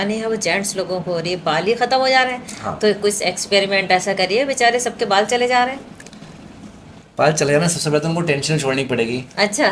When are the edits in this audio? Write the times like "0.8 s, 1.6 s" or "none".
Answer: none